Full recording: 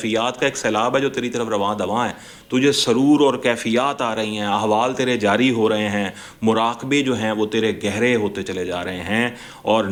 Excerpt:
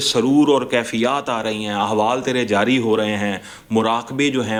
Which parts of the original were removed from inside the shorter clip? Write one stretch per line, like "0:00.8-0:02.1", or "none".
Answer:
none